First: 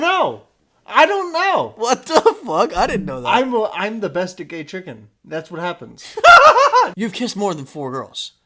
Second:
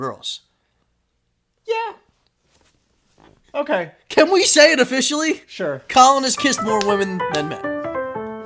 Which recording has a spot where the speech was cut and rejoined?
first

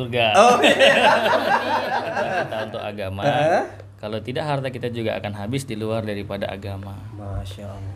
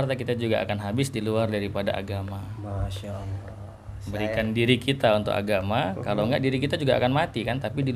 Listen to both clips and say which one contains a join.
first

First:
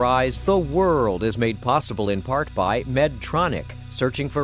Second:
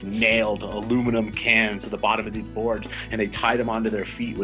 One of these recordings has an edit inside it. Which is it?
second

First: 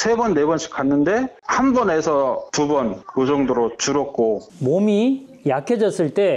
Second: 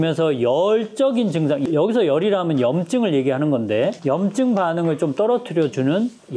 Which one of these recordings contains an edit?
first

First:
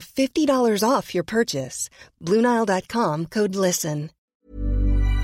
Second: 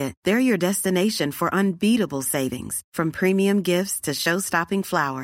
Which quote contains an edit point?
first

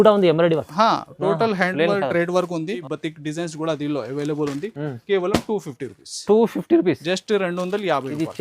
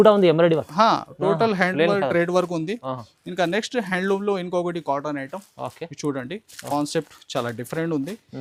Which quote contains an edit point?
first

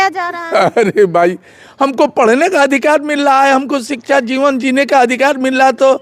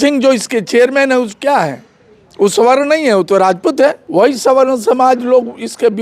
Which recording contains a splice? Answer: second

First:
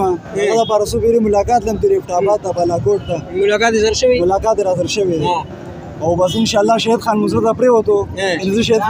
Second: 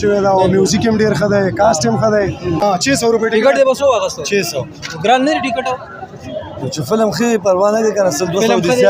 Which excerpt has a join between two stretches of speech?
second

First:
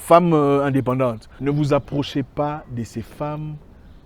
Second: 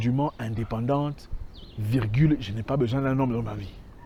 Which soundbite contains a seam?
first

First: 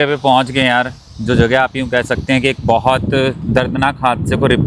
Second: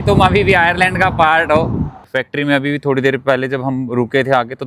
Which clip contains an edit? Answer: second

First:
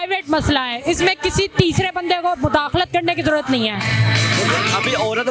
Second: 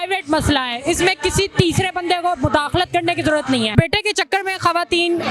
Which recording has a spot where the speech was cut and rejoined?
second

